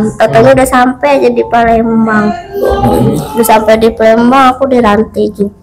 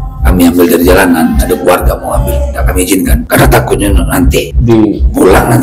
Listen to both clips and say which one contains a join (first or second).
second